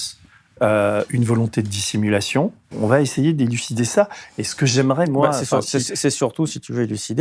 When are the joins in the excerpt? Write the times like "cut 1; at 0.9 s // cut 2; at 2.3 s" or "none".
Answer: cut 1; at 2.6 s